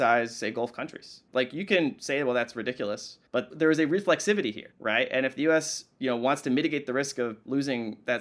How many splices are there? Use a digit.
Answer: 1